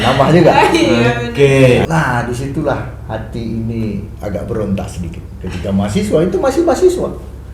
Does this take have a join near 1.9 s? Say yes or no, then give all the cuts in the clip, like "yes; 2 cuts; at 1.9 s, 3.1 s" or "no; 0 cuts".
yes; 1 cut; at 1.9 s